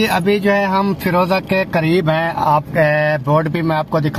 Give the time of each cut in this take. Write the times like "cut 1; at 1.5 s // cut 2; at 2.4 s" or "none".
none